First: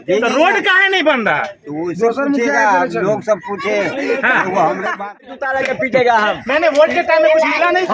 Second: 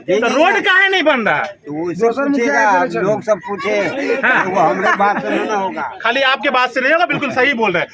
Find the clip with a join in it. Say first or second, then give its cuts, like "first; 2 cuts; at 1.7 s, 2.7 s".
first; 1 cut; at 5.3 s